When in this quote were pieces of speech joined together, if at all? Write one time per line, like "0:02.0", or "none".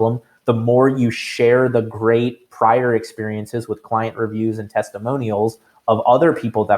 none